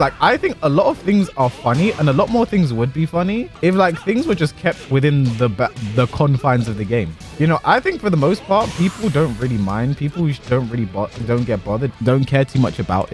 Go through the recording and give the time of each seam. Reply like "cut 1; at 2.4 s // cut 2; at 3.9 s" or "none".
cut 1; at 3.5 s // cut 2; at 7.2 s // cut 3; at 11.9 s

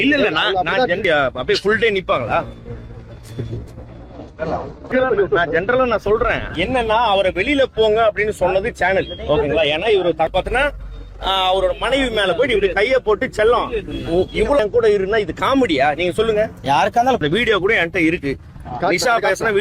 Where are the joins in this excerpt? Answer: cut 1; at 1.0 s // cut 2; at 4.9 s // cut 3; at 10.3 s // cut 4; at 14.6 s // cut 5; at 17.2 s

